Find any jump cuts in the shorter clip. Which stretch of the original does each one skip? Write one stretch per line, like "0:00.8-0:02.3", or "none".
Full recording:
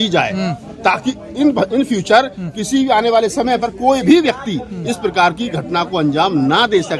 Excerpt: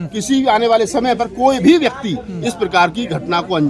none